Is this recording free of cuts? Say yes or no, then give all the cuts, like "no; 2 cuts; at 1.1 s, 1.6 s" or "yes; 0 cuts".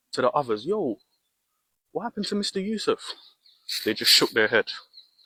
yes; 0 cuts